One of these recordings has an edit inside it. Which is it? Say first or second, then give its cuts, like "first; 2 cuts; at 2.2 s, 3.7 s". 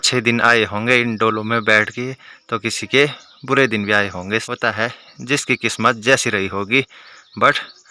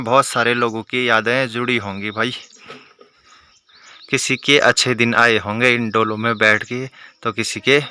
first; 1 cut; at 4.5 s